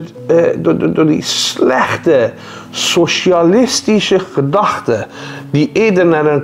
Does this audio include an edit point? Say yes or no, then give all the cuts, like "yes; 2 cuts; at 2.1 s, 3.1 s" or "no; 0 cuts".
no; 0 cuts